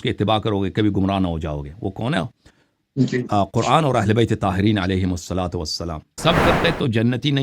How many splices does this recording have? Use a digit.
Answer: 1